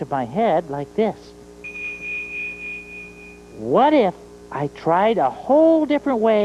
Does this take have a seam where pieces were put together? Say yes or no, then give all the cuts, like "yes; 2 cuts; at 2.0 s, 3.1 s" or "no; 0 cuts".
no; 0 cuts